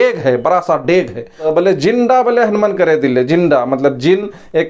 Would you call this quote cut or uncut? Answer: cut